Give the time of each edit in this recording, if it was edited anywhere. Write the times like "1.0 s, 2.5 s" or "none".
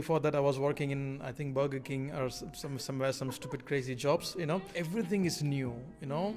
4.7 s

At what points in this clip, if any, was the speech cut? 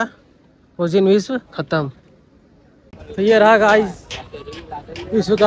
2.8 s

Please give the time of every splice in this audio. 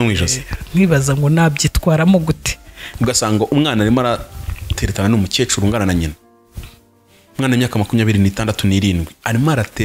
2.9 s

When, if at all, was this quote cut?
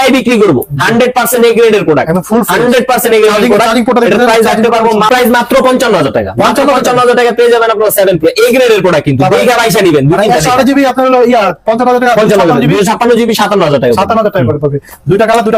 none

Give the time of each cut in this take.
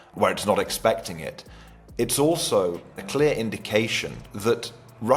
none

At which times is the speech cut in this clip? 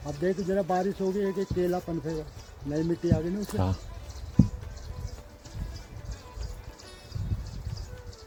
none

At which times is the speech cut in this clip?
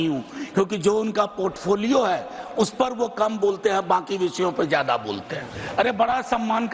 5.6 s

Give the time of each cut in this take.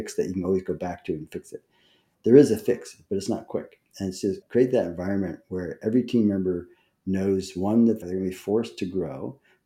2.1 s, 4.4 s, 8.0 s

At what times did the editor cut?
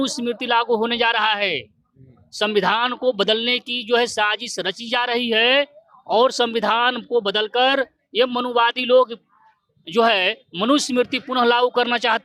none

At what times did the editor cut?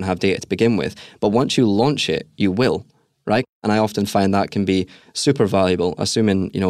3.6 s

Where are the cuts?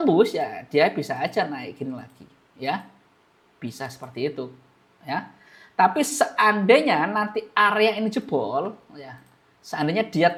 none

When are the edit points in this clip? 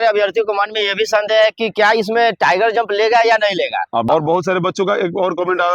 4.0 s

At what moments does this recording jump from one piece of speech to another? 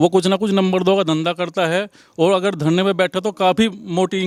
none

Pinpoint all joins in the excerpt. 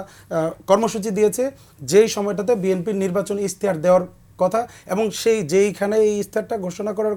none

